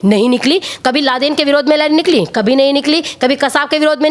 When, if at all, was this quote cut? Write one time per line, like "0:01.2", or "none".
none